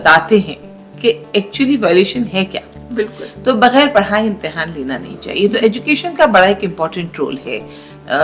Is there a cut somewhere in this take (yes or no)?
no